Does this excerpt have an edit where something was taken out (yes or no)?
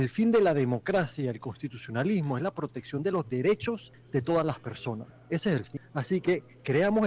yes